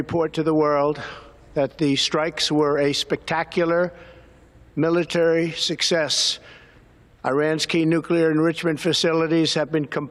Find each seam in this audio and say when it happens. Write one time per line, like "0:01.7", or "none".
none

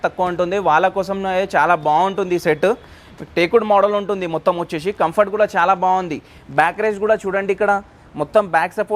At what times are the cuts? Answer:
none

